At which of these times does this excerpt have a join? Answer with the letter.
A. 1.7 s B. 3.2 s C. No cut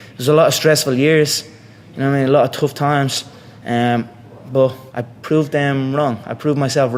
C